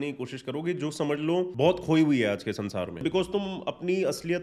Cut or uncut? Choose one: cut